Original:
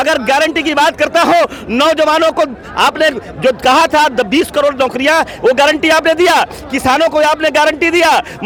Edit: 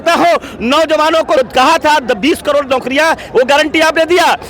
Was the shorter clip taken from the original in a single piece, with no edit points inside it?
no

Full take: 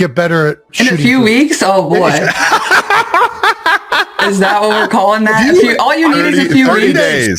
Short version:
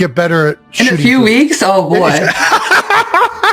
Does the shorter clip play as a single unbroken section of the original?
yes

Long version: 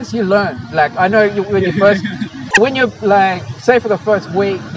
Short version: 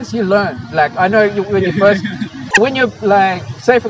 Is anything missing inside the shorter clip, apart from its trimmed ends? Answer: no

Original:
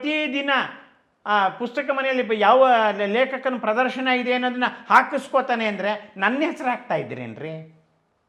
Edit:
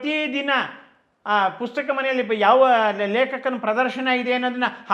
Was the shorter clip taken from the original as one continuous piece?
yes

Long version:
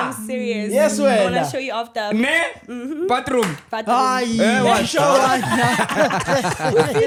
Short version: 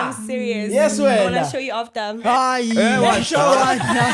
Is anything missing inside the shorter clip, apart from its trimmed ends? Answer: yes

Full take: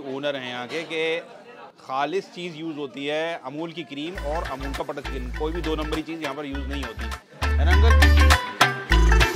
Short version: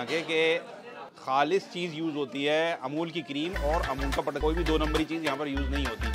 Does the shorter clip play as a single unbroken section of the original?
no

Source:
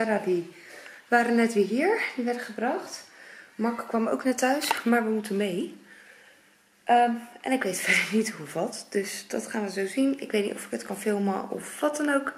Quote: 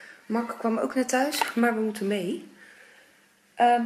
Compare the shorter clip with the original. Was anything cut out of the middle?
no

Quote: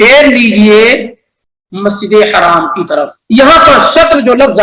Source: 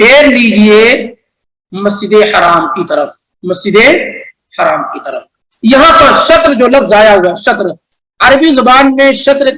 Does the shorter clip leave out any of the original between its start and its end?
yes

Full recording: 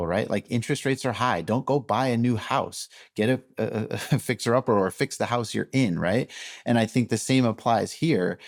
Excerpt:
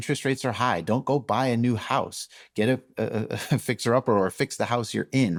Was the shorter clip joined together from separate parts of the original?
no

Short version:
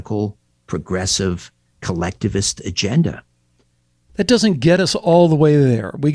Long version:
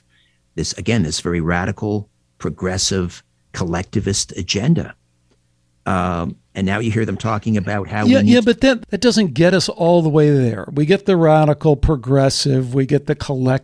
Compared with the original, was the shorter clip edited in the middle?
yes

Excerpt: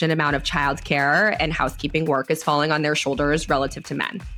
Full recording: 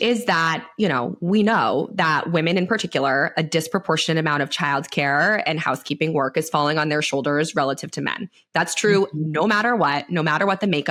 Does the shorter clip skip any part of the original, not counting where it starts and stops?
no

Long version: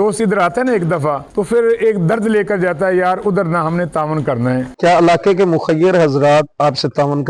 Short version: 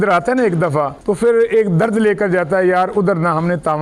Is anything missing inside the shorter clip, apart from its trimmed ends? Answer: no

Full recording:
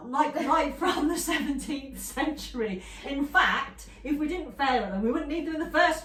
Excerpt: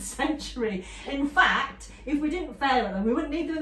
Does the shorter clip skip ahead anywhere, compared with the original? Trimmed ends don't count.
no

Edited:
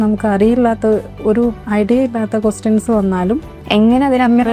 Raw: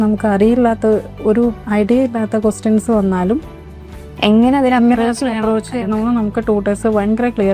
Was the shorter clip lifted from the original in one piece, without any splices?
no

